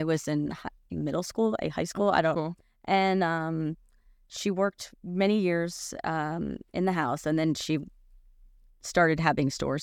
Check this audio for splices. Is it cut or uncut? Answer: uncut